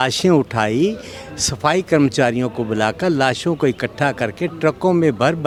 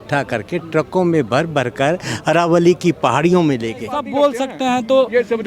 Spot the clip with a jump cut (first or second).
second